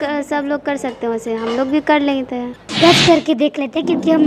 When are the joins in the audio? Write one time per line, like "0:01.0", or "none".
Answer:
0:02.6